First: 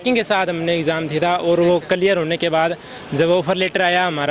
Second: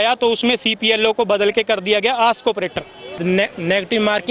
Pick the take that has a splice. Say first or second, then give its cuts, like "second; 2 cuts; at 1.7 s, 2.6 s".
second; 1 cut; at 3.1 s